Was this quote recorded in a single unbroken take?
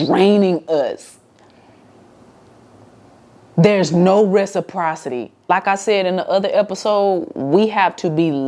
yes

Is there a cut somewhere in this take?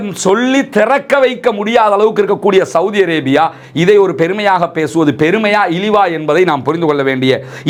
no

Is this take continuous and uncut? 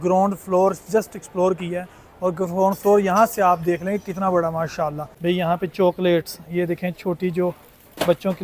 no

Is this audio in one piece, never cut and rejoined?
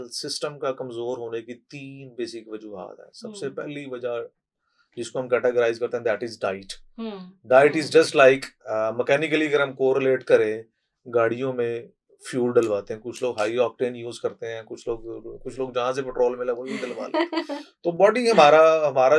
yes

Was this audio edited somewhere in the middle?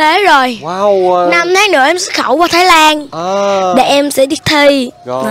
no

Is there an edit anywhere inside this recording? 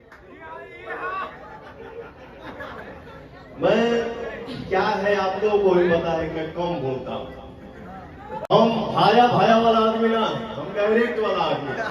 yes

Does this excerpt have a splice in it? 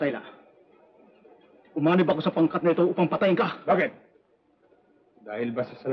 no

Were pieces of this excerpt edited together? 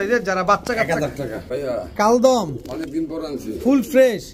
yes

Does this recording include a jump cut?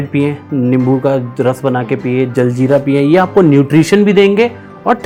no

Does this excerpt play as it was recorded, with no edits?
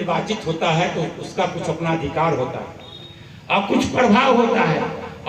yes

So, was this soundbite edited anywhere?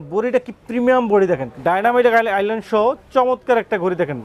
yes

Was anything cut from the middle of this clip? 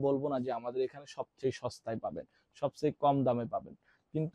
no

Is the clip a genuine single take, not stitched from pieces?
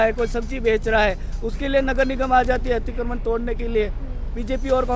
yes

